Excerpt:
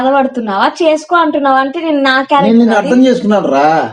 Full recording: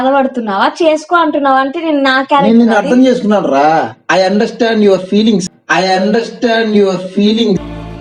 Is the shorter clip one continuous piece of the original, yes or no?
yes